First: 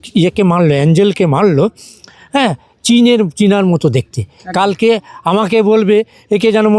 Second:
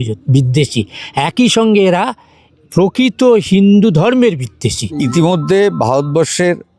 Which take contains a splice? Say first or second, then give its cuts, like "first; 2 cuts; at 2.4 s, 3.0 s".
second; 1 cut; at 5.0 s